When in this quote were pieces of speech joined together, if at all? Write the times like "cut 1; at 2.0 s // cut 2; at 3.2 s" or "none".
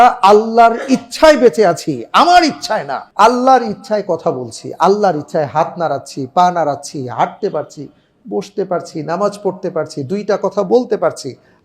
cut 1; at 3.0 s